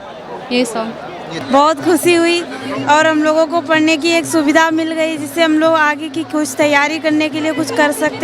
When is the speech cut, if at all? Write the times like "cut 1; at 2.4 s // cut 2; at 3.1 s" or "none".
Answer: cut 1; at 1.4 s